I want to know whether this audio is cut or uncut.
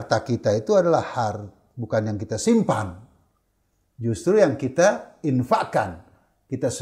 uncut